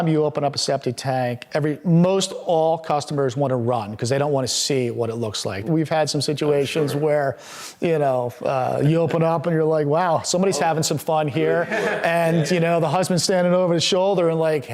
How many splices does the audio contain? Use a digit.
1